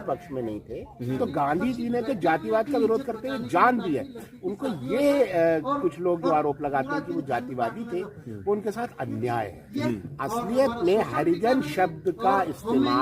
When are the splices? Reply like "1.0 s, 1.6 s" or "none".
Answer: 1.2 s, 9.8 s

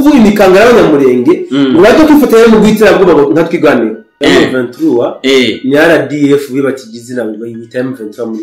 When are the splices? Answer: 4.1 s

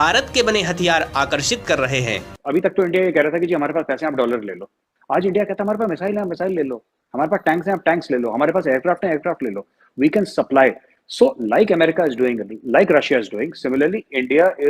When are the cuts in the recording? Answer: 2.2 s

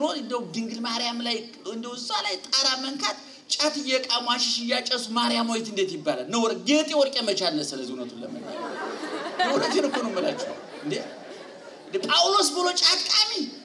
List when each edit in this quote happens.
none

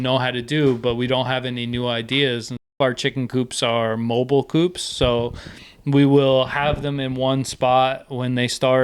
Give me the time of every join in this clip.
2.8 s

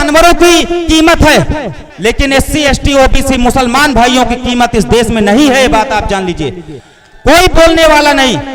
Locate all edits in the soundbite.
1.8 s

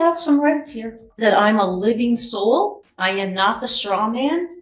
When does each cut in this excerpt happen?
1.1 s, 2.9 s

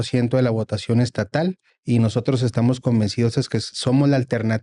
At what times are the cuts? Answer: 1.7 s

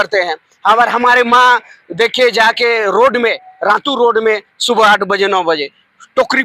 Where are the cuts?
none

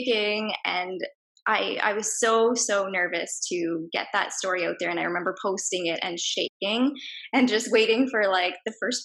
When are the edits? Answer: none

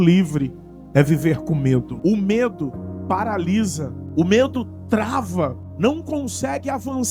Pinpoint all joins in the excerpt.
1.9 s, 3.9 s, 5.7 s

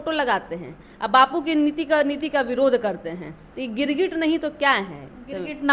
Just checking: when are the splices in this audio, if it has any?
none

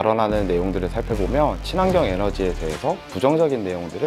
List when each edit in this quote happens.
none

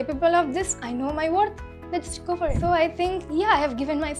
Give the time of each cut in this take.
2.6 s

